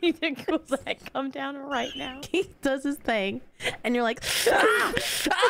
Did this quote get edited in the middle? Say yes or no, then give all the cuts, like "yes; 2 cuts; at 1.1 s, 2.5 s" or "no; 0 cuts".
yes; 1 cut; at 2.1 s